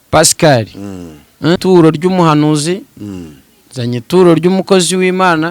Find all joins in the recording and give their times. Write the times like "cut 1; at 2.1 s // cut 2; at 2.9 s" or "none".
cut 1; at 1.6 s